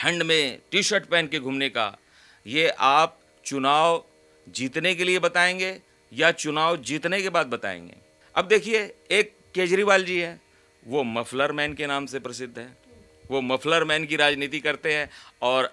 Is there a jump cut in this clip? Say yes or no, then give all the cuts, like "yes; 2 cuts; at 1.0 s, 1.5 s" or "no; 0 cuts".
yes; 1 cut; at 8.1 s